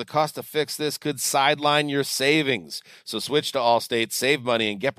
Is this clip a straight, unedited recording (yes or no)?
yes